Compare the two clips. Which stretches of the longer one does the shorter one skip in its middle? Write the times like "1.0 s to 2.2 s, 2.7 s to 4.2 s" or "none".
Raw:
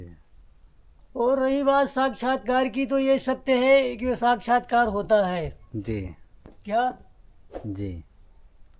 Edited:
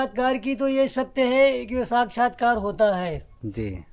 none